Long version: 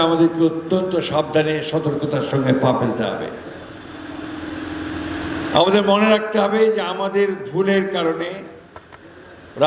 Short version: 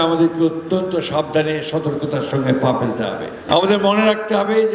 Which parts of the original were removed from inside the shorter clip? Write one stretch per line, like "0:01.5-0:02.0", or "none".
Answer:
0:03.4-0:05.4